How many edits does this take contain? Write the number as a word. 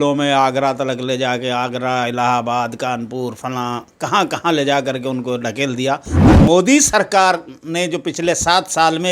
one